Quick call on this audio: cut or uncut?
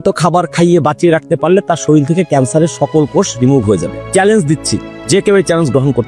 uncut